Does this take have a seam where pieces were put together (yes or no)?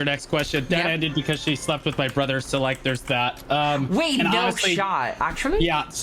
yes